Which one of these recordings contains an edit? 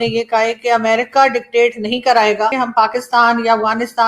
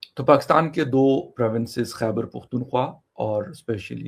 first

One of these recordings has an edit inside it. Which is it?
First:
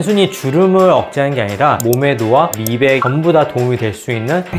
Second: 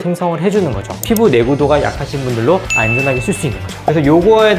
first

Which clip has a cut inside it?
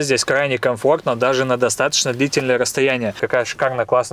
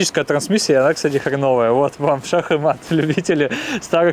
first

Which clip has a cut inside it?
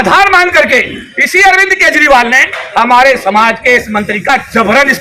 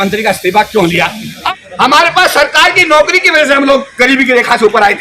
second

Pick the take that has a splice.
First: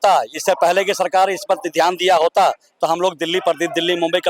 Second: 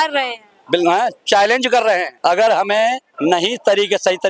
second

